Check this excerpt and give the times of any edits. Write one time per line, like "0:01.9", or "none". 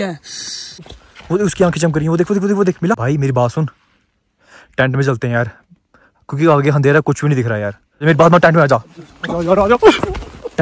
0:01.0
0:03.0
0:08.0